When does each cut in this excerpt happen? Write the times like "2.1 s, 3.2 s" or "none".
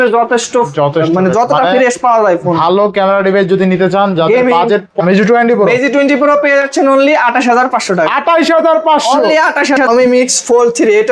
4.9 s, 9.8 s